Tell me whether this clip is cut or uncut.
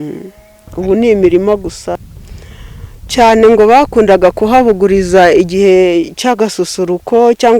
cut